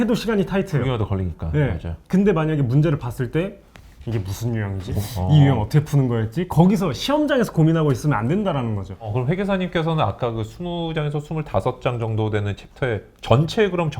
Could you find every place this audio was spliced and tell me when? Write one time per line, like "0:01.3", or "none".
0:04.9
0:09.1